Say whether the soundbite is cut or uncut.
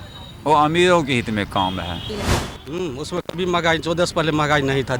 cut